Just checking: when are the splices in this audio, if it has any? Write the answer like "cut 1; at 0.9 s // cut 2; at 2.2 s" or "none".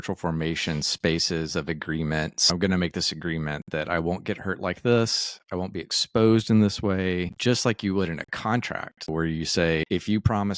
cut 1; at 2.5 s // cut 2; at 7.3 s // cut 3; at 9.1 s // cut 4; at 9.8 s